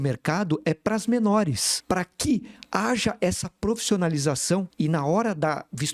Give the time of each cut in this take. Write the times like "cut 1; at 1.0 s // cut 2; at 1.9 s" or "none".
cut 1; at 1.7 s // cut 2; at 4.7 s